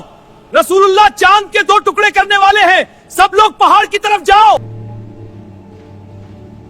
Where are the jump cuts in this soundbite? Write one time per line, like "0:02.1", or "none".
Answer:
0:04.6